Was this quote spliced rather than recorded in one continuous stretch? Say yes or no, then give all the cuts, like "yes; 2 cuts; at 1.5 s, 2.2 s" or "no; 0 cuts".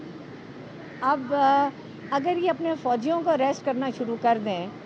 no; 0 cuts